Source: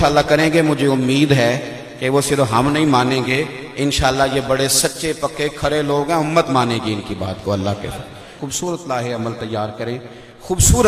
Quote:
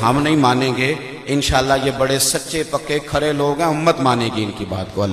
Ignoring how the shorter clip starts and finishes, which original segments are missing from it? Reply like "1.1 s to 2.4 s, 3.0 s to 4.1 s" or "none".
none